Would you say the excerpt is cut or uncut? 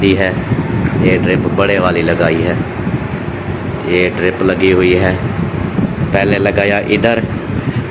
uncut